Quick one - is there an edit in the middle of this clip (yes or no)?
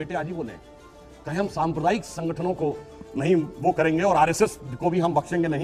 no